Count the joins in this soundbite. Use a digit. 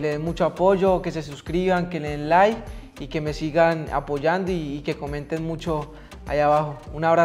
0